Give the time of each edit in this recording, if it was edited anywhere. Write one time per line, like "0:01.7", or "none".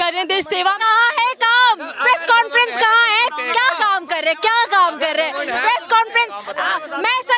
none